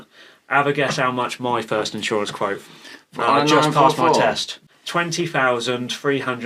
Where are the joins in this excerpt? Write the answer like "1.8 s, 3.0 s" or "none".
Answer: 4.7 s